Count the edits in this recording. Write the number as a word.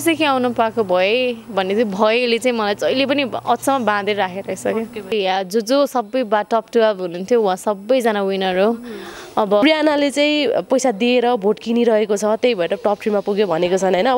two